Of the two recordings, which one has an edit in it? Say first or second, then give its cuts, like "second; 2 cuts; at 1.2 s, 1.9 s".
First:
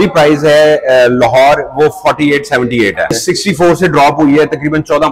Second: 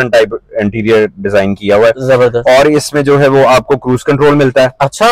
first; 1 cut; at 3.1 s